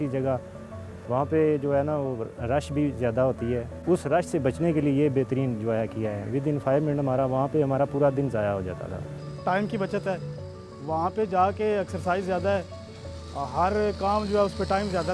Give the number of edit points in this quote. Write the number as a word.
one